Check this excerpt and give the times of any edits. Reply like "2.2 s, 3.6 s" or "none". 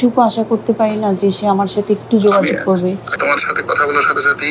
3.1 s